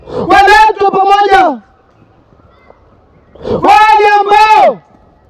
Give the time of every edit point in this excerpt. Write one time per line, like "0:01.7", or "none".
none